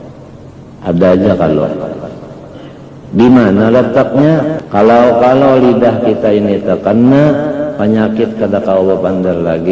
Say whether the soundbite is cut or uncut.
cut